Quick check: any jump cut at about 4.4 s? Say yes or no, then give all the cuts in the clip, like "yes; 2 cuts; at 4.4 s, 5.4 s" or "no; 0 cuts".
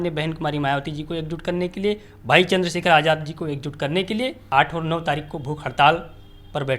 yes; 1 cut; at 4.4 s